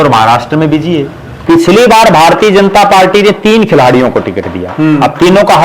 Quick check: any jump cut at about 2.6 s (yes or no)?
no